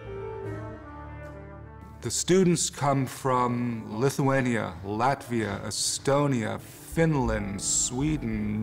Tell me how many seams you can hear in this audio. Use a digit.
1